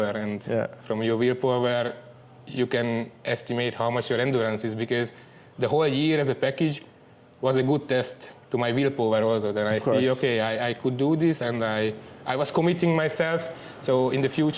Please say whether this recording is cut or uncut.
uncut